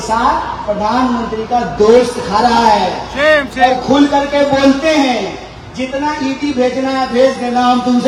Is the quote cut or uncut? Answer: uncut